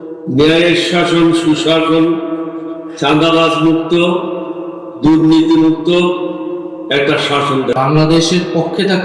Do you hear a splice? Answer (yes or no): yes